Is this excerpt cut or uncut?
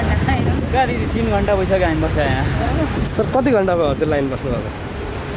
uncut